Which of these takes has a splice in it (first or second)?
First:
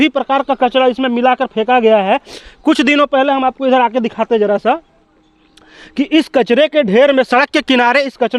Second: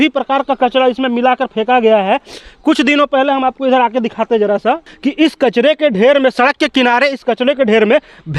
second